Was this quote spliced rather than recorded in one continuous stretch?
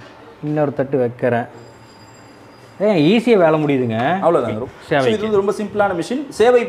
yes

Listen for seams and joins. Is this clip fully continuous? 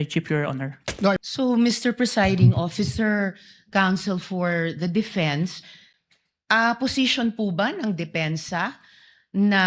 no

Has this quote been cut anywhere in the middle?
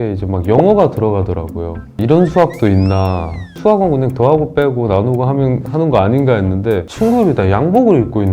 yes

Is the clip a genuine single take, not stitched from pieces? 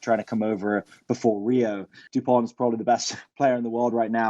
no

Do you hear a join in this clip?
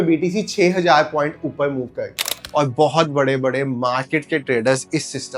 yes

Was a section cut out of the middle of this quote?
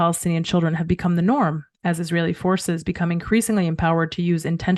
no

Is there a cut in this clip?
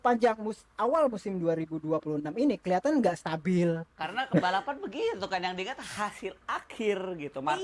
yes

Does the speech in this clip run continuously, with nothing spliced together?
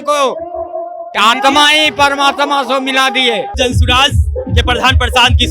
no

